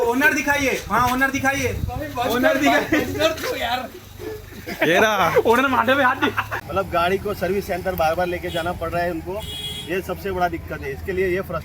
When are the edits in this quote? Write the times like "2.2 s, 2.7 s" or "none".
6.5 s